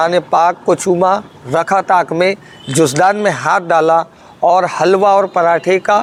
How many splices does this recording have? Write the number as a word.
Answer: zero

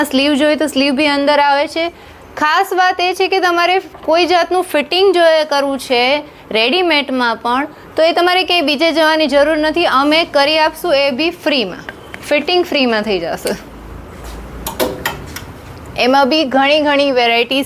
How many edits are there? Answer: zero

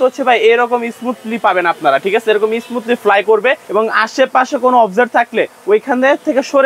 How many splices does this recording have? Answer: one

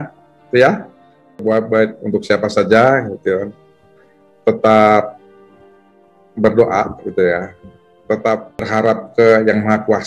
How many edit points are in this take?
two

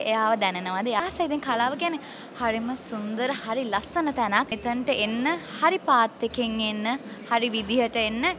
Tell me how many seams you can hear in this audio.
two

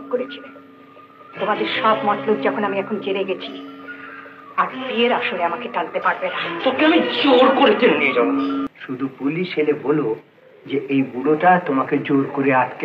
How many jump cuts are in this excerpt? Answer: one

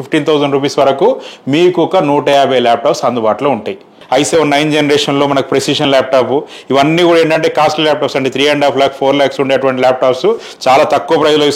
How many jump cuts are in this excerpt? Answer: one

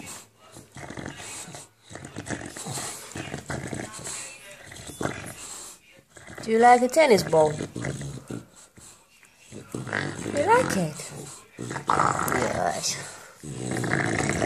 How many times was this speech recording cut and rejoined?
zero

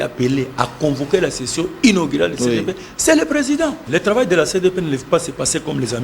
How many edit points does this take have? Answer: one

